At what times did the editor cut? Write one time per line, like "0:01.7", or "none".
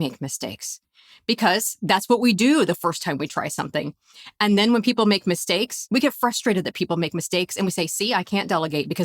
0:05.8
0:07.9